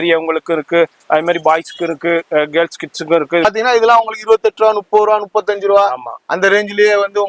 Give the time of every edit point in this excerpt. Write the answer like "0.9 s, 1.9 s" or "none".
3.4 s